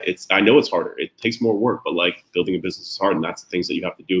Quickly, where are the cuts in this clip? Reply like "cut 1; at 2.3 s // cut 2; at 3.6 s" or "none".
none